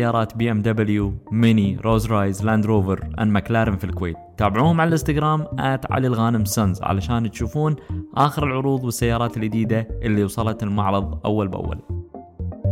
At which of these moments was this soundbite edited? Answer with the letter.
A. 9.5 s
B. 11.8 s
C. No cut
B